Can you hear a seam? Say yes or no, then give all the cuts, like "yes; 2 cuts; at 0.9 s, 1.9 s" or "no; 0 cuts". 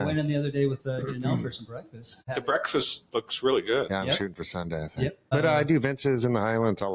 yes; 2 cuts; at 2.2 s, 5.3 s